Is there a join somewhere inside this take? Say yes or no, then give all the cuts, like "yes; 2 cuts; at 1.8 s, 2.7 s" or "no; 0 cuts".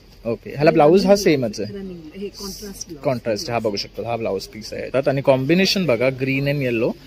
yes; 1 cut; at 4.8 s